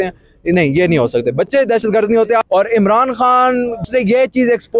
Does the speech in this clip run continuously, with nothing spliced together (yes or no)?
no